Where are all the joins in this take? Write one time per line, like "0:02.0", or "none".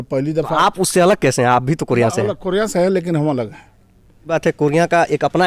0:04.2